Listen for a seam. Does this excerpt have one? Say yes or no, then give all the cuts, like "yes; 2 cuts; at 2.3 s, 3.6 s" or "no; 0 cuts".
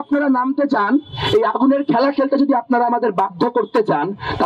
no; 0 cuts